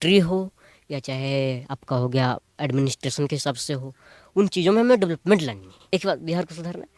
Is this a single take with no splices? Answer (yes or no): no